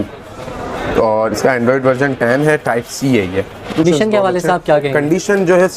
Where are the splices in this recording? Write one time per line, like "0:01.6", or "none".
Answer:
0:03.8